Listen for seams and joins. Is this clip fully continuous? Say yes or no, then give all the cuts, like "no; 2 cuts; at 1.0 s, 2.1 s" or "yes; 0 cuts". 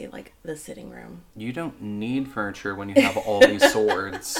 yes; 0 cuts